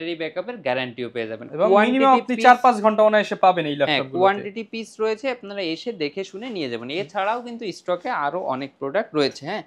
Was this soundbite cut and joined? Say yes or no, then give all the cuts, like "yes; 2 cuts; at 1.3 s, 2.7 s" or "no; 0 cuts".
no; 0 cuts